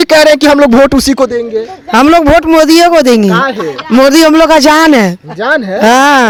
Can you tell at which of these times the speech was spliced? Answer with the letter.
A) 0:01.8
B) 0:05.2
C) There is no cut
C